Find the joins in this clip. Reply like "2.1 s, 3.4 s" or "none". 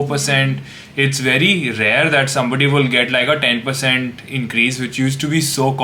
none